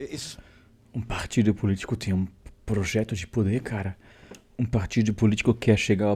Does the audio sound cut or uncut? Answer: uncut